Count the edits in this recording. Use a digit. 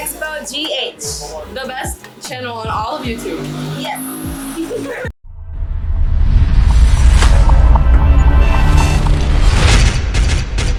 0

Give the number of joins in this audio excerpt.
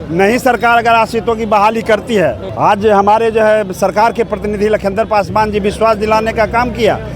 1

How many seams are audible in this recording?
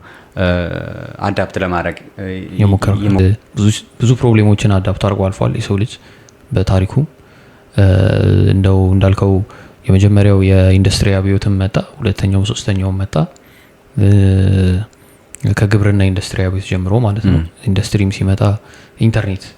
1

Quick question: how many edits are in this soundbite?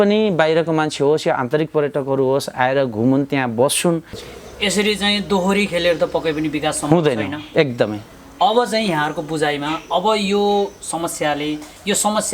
1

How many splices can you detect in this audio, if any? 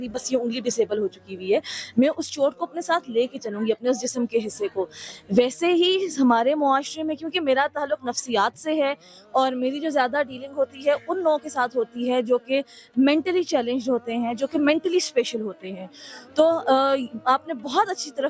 0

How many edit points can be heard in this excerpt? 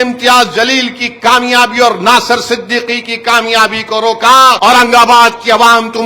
1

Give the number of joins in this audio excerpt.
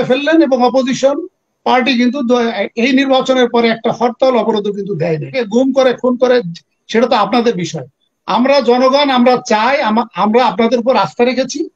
1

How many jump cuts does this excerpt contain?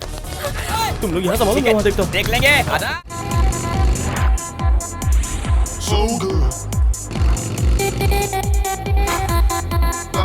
1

